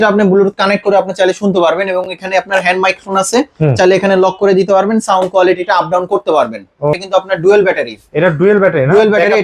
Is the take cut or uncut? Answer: cut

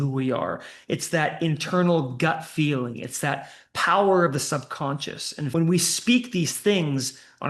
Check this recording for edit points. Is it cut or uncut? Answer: cut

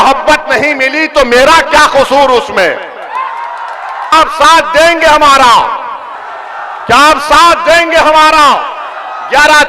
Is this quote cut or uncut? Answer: cut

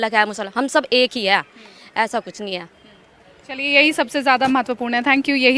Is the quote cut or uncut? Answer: uncut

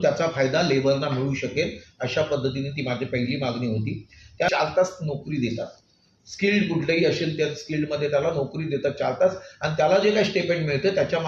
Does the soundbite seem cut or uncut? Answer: cut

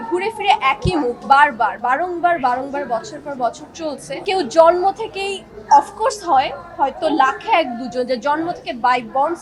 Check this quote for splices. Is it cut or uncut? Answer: cut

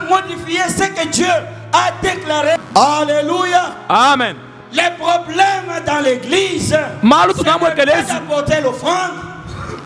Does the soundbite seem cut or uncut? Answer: cut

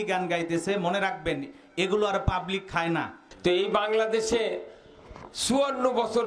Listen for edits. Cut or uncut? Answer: cut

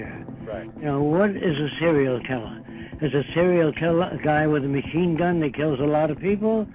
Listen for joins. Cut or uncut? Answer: uncut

